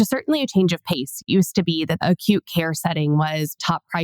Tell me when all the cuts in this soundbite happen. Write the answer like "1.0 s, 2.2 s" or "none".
1.2 s